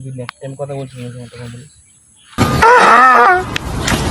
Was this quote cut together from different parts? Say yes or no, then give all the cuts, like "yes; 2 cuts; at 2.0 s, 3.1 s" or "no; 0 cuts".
no; 0 cuts